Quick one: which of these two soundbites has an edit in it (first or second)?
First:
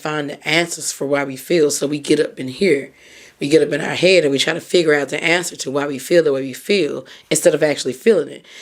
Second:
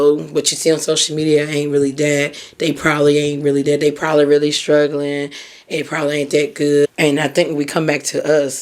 second